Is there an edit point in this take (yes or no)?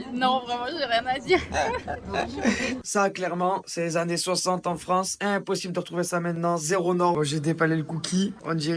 yes